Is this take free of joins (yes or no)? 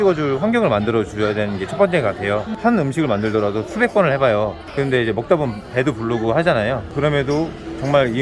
yes